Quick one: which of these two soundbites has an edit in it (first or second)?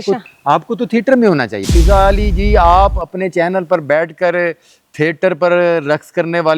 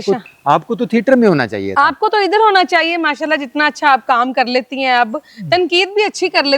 first